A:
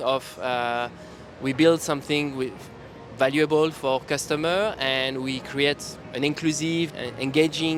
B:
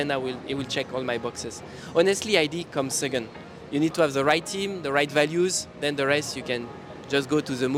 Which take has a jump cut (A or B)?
A